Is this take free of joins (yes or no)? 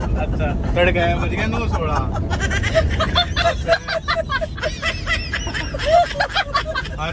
yes